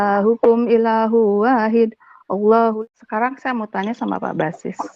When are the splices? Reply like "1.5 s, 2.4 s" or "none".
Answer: 2.8 s